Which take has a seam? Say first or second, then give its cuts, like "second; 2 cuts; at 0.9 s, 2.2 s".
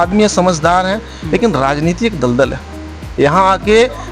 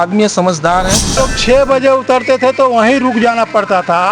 second; 1 cut; at 1.1 s